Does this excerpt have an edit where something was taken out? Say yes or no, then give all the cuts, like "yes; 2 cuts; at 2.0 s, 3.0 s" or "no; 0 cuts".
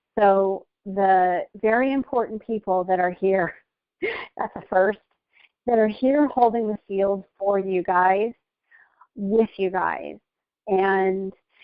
yes; 1 cut; at 6.2 s